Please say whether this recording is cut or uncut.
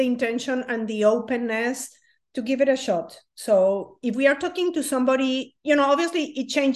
uncut